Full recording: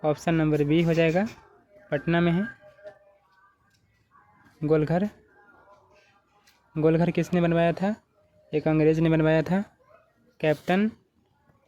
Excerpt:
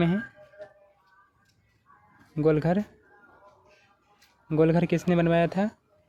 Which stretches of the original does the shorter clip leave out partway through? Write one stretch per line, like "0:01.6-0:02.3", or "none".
none